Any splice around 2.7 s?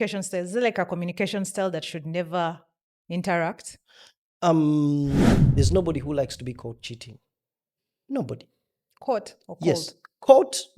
no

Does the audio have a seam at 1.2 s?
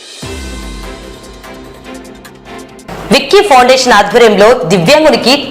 no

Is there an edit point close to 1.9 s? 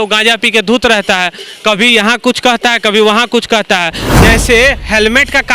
no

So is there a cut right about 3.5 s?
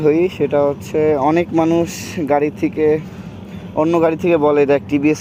no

